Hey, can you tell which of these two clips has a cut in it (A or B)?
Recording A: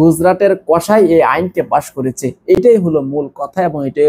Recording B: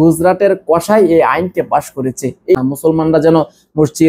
B